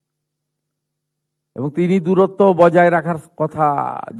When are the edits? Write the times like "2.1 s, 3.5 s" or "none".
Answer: none